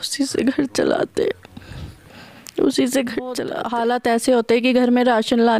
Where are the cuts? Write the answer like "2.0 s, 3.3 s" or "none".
3.5 s